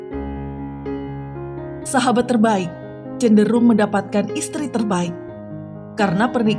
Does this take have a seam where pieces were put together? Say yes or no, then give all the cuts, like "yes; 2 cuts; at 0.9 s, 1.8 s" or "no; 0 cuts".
yes; 1 cut; at 1.9 s